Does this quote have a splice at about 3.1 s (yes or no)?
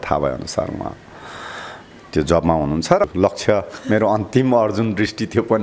yes